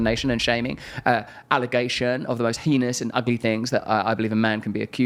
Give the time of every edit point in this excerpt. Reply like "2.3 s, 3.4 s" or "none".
none